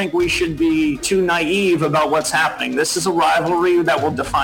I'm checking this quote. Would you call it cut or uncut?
cut